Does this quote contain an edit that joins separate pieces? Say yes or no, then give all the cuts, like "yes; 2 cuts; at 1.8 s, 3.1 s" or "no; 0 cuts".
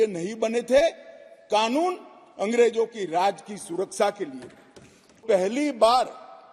yes; 1 cut; at 5.2 s